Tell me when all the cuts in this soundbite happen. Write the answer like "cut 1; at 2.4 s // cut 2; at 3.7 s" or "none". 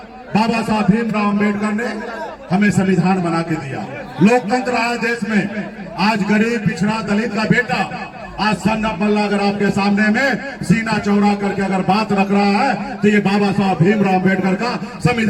none

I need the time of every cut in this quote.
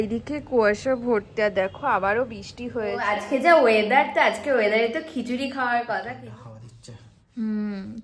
cut 1; at 3.1 s // cut 2; at 6.2 s

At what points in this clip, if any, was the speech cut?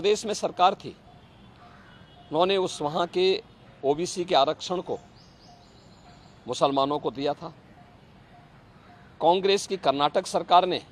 none

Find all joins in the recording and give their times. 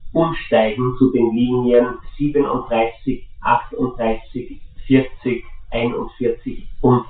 none

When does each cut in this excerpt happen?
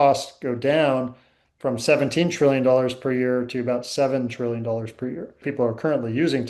cut 1; at 5.5 s

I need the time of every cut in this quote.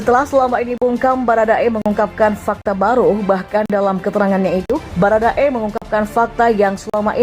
cut 1; at 4.8 s

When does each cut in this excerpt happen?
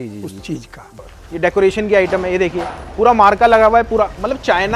cut 1; at 1.2 s

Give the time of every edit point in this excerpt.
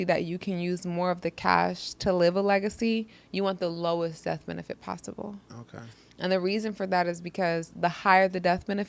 none

